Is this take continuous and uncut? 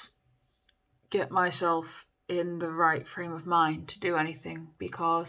yes; 0 cuts

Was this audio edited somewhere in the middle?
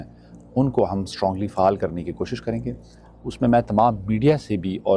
no; 0 cuts

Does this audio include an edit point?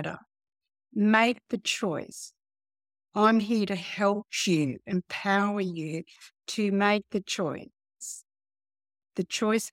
no; 0 cuts

